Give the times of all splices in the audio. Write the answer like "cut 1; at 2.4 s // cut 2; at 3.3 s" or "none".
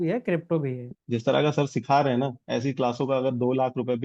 cut 1; at 0.9 s